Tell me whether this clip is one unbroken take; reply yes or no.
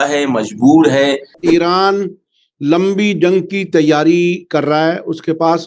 no